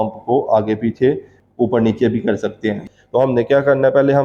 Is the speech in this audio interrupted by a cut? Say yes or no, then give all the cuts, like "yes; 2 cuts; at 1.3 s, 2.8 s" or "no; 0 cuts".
yes; 2 cuts; at 1.4 s, 2.8 s